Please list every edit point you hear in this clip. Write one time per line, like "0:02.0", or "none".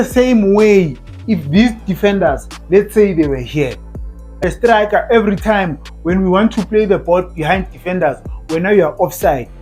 0:04.4